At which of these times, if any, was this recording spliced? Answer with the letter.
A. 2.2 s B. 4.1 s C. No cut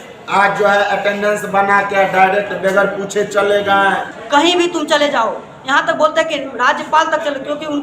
B